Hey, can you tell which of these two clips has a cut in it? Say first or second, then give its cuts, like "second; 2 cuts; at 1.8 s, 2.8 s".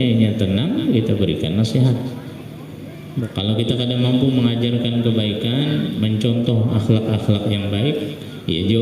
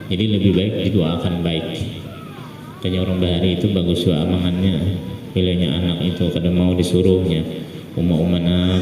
first; 1 cut; at 3.1 s